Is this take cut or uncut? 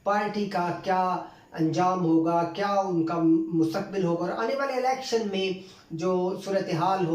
uncut